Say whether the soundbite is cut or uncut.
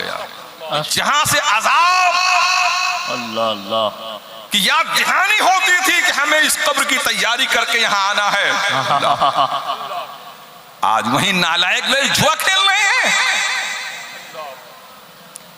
cut